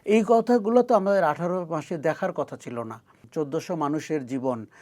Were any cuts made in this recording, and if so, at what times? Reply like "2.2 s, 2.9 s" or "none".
3.2 s